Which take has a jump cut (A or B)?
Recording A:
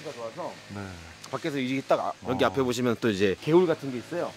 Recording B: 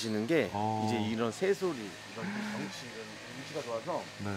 A